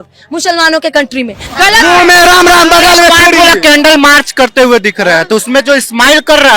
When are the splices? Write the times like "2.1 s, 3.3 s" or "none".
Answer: 1.5 s

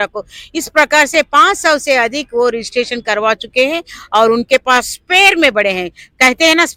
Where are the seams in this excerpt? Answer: none

